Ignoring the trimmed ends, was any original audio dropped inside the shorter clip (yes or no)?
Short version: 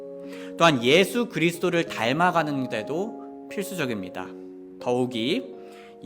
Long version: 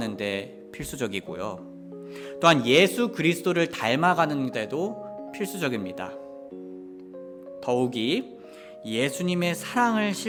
yes